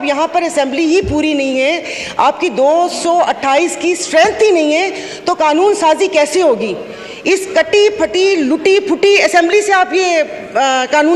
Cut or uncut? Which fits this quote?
uncut